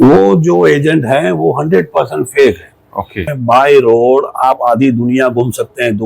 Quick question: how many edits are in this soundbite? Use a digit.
1